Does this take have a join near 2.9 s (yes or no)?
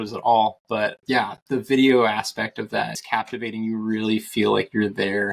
yes